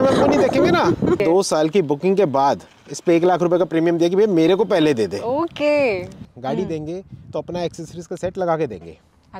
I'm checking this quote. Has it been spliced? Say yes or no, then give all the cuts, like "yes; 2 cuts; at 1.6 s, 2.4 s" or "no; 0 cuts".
yes; 2 cuts; at 1.2 s, 6.2 s